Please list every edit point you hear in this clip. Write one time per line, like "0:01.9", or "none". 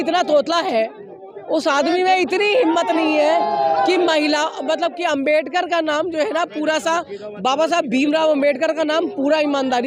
none